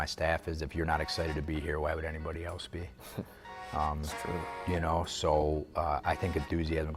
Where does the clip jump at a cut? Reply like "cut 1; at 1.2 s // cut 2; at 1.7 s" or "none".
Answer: none